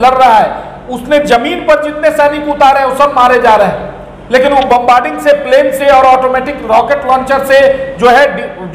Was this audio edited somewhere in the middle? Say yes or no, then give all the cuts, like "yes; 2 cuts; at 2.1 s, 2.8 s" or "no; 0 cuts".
no; 0 cuts